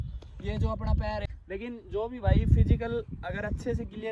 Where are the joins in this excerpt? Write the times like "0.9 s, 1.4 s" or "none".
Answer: 1.3 s